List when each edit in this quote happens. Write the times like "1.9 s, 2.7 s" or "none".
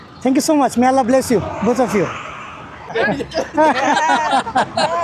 2.9 s